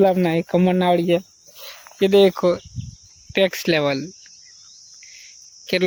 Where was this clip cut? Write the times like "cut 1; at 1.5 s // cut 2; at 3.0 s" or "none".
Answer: none